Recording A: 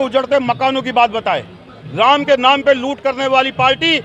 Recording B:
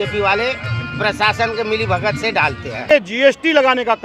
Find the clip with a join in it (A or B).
B